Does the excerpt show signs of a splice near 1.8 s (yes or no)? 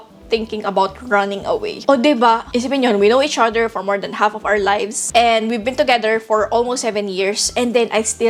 no